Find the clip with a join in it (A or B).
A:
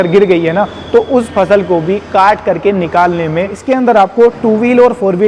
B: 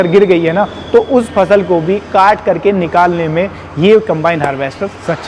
A